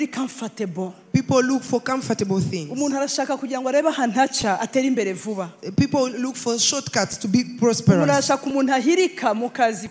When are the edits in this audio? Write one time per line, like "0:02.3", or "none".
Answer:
none